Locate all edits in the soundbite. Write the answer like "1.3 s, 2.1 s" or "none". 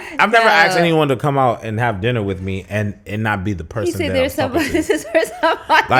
none